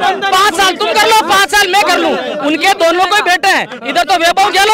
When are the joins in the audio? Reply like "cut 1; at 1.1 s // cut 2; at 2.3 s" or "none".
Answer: none

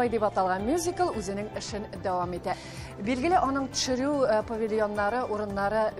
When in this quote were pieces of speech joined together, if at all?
cut 1; at 2.6 s

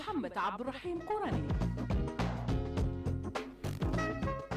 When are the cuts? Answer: cut 1; at 1.5 s

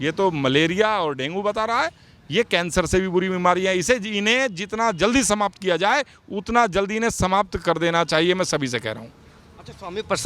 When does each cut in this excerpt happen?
none

